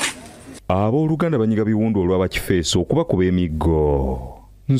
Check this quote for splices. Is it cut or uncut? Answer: uncut